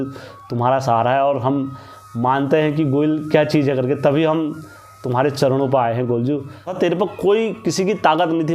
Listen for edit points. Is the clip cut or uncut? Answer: cut